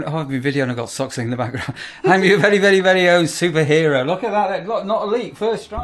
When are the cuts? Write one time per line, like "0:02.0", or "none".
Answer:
none

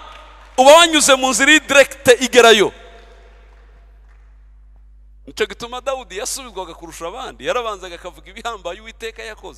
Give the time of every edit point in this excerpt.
none

